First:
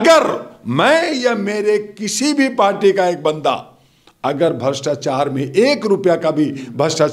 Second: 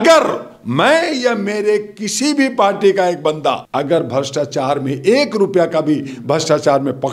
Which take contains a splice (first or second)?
second